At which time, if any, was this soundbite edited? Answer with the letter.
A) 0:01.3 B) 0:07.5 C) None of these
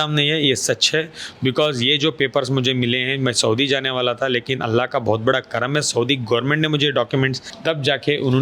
B